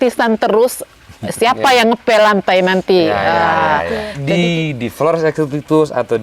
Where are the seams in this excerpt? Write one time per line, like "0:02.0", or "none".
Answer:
0:04.1

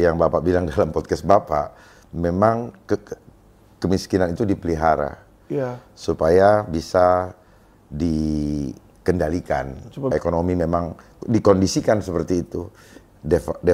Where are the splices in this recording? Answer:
0:10.1

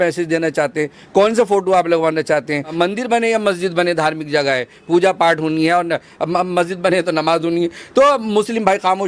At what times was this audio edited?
0:02.7

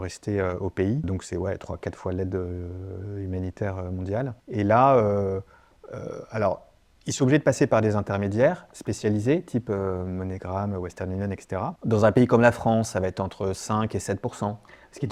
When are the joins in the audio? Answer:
0:01.1
0:04.4
0:11.8

